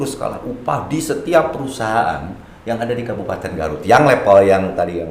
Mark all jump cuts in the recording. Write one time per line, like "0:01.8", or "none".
none